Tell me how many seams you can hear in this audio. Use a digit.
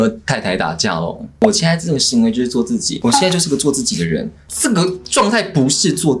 1